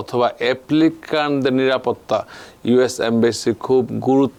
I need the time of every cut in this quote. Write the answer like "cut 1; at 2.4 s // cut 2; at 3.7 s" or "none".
none